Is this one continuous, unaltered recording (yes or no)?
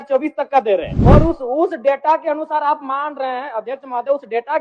no